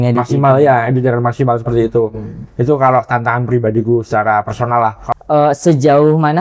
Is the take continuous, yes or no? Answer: no